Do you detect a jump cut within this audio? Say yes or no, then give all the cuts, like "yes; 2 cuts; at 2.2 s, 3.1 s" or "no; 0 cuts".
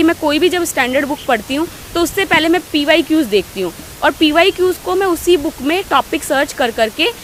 no; 0 cuts